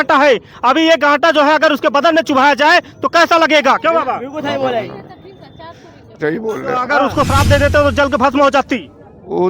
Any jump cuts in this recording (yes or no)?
yes